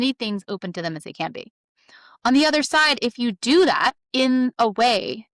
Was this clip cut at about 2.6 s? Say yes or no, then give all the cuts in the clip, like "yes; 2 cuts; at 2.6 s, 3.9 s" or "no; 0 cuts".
no; 1 cut; at 4.0 s